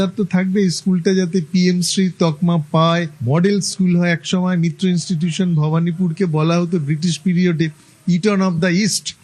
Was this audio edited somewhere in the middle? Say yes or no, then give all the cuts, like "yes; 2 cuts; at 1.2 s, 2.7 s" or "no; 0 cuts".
no; 0 cuts